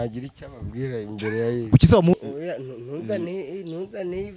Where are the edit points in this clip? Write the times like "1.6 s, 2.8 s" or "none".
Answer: 2.1 s